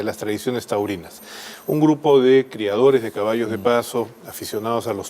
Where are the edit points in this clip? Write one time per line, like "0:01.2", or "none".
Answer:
0:01.4